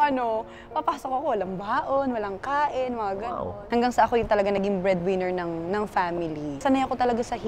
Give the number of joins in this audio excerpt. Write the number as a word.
two